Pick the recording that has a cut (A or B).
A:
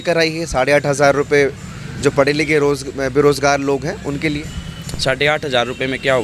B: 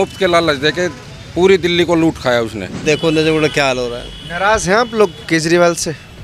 B